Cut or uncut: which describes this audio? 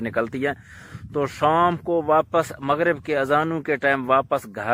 uncut